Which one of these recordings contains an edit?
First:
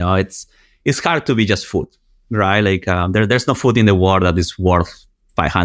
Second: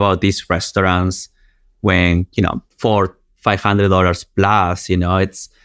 second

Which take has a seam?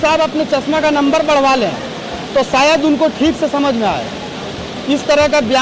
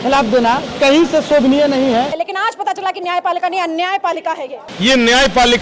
second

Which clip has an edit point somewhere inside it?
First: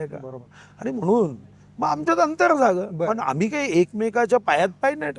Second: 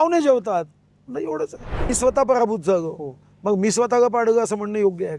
second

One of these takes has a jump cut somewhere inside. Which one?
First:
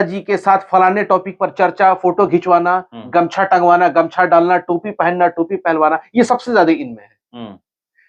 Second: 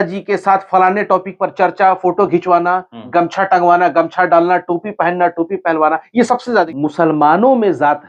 second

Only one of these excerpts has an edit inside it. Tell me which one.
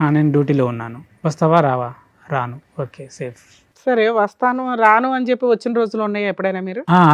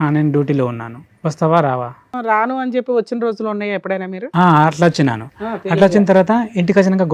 second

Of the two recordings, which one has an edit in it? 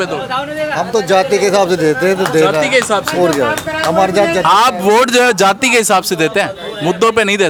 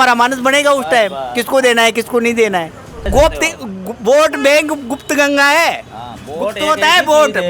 second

